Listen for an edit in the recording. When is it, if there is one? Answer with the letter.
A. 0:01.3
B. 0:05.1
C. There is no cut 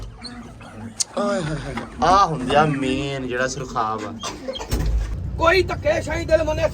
B